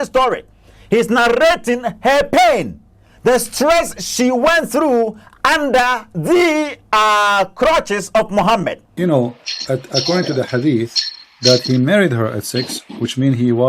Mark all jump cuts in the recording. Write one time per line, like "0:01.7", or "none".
0:08.8